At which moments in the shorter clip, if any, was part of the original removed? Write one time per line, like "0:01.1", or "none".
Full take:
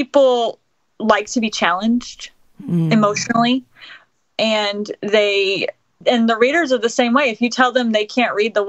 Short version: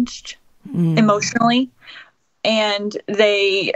none